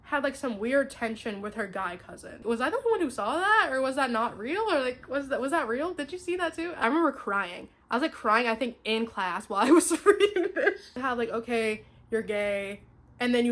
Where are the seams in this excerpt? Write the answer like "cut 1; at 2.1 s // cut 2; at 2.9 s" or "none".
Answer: cut 1; at 2.4 s // cut 2; at 6.8 s // cut 3; at 11.0 s